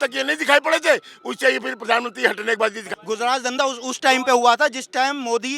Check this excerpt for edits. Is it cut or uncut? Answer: cut